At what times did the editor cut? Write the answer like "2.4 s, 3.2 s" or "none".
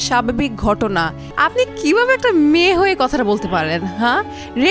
1.2 s